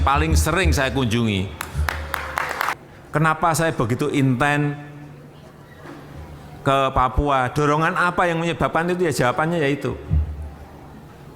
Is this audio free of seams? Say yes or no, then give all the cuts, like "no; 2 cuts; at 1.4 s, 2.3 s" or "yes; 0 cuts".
no; 1 cut; at 2.8 s